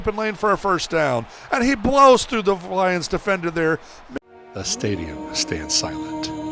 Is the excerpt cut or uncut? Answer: cut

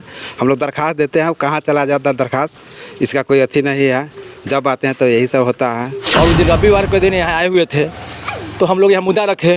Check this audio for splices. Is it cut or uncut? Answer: cut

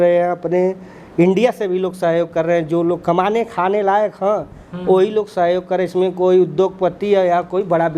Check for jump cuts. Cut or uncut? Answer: uncut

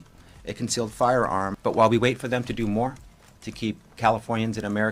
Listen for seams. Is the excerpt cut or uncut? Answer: cut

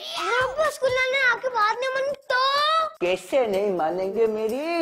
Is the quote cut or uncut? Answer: uncut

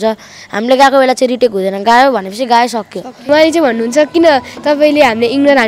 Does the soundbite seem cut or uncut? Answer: cut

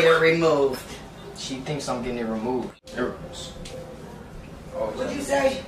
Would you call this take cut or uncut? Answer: cut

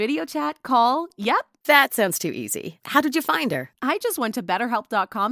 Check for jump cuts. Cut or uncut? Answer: uncut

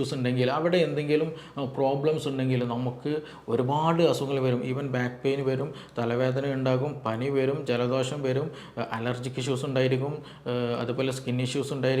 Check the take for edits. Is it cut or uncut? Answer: uncut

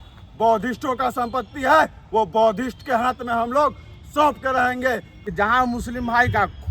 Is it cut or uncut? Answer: cut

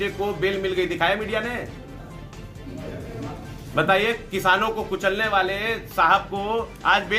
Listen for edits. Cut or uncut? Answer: uncut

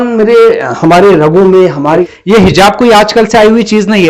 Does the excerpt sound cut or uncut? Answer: cut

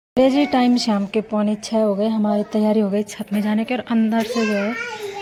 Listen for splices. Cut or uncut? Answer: uncut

